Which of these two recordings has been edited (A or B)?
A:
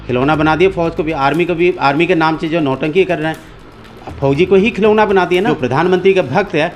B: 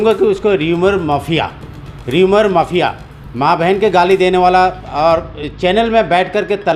A